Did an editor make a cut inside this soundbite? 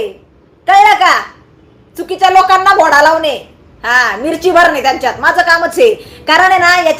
no; 0 cuts

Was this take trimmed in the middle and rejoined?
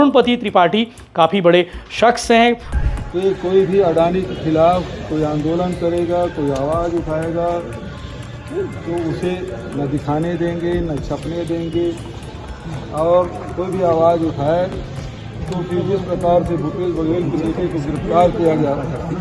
yes; 1 cut; at 2.7 s

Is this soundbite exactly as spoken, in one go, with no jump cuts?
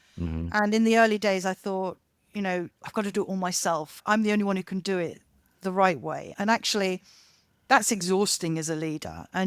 no; 1 cut; at 4.0 s

